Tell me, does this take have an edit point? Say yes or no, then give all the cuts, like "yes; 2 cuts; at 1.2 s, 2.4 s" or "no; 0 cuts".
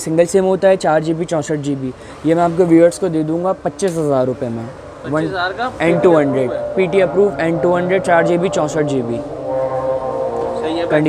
no; 0 cuts